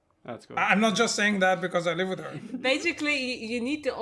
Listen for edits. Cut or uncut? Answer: cut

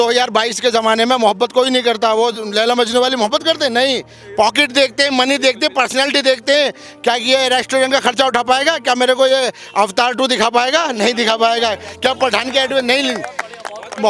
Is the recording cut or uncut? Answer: uncut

